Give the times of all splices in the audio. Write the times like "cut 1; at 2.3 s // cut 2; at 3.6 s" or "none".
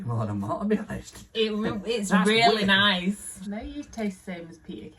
cut 1; at 3.3 s